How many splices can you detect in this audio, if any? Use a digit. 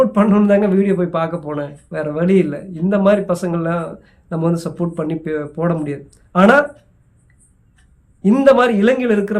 0